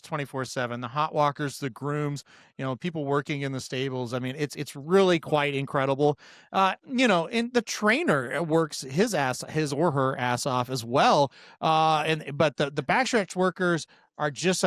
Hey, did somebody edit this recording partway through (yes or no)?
no